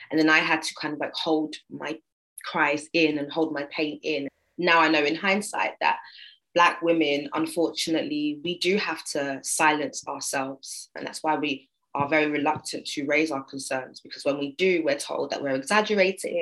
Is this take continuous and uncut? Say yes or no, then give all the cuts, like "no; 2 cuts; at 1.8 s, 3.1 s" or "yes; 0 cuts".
no; 2 cuts; at 4.3 s, 11.0 s